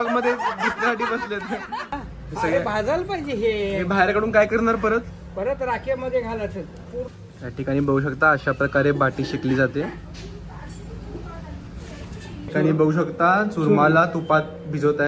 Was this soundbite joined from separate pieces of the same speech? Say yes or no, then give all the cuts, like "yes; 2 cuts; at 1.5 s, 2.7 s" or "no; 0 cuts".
yes; 3 cuts; at 1.9 s, 7.1 s, 12.5 s